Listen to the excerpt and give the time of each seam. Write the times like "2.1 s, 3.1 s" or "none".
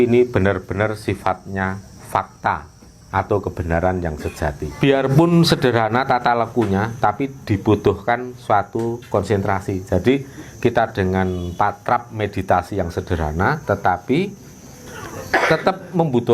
4.8 s

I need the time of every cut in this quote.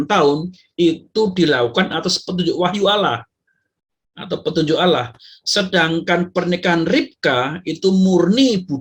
none

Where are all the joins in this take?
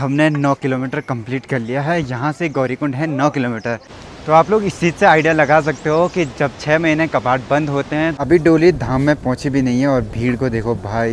3.9 s, 8.1 s

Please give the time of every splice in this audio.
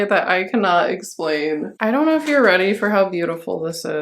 1.7 s

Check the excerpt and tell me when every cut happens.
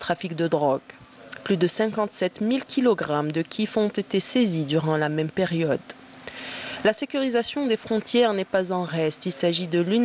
4.6 s

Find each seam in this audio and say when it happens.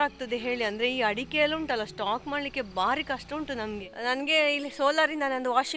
3.9 s

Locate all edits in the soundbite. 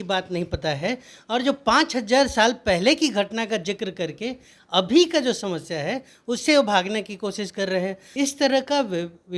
8.0 s

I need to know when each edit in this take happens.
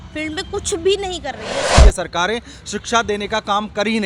1.8 s

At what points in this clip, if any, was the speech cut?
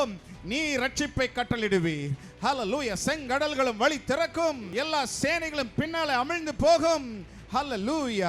4.7 s

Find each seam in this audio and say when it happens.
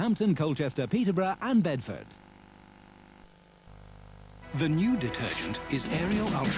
5.0 s

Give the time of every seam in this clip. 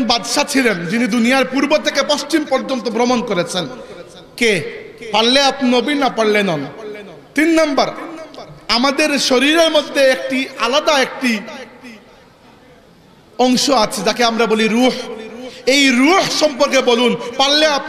none

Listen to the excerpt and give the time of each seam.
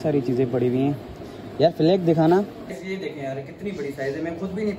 2.7 s

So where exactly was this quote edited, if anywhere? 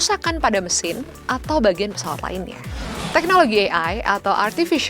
3.0 s

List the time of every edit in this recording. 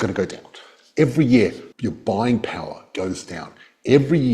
1.7 s

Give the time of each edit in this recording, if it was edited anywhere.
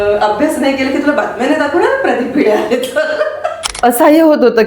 3.7 s

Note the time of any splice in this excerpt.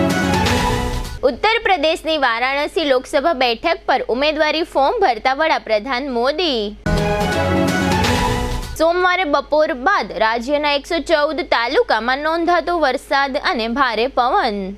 1.0 s

